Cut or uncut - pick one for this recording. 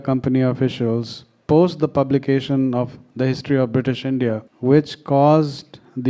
cut